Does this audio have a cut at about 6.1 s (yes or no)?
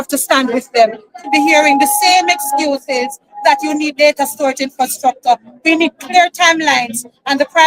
no